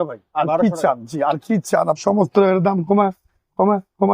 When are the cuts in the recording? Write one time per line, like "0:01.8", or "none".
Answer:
0:02.0